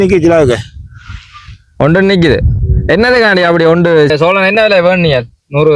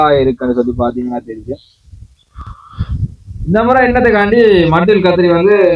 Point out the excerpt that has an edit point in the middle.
first; 1 cut; at 4.1 s

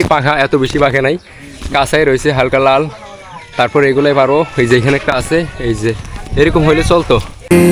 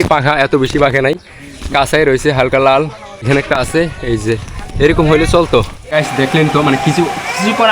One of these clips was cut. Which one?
second; 2 cuts; at 3.3 s, 5.8 s

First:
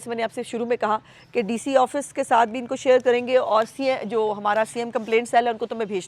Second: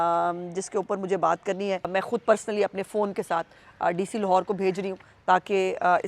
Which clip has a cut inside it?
second; 1 cut; at 1.9 s

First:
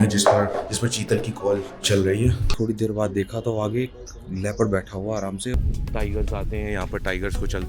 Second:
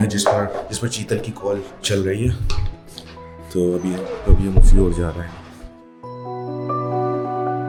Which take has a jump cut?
first; 2 cuts; at 2.5 s, 5.5 s

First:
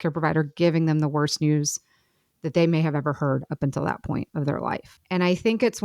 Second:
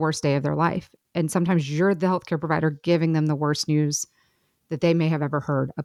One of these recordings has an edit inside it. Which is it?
first; 1 cut; at 4.9 s

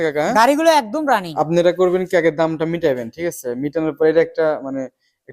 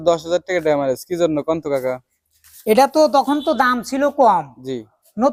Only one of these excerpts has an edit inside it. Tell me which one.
first; 1 cut; at 1.3 s

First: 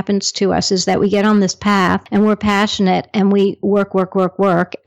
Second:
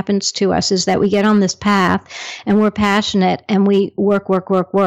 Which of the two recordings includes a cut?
first; 1 cut; at 2.0 s

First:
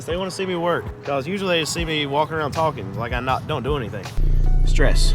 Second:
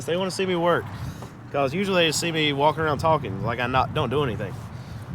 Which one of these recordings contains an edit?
first; 2 cuts; at 0.9 s, 4.2 s

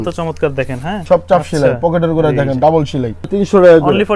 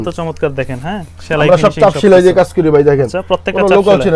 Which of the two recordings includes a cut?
first; 2 cuts; at 0.9 s, 3.3 s

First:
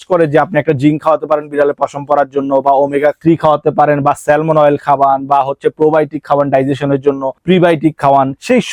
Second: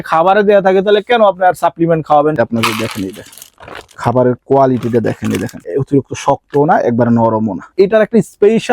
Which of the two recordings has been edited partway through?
second; 3 cuts; at 2.4 s, 5.6 s, 7.7 s

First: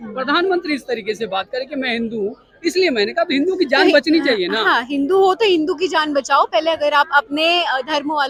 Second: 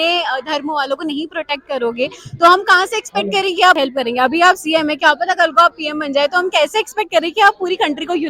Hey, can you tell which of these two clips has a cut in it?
second; 1 cut; at 3.8 s

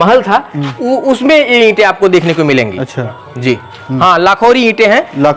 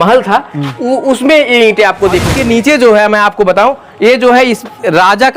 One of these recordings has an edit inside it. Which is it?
second; 1 cut; at 2.3 s

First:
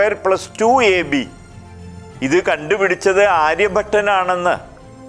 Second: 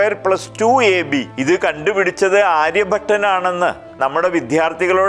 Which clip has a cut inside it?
second; 2 cuts; at 1.3 s, 3.9 s

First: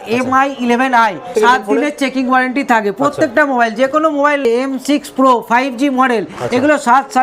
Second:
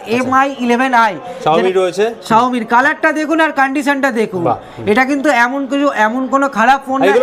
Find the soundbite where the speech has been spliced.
first; 2 cuts; at 1.3 s, 4.4 s

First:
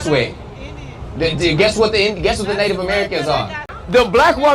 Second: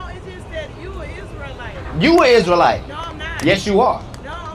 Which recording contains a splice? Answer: first; 1 cut; at 3.5 s

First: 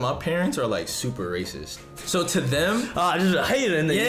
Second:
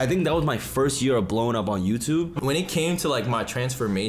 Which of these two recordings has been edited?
second; 1 cut; at 2.3 s

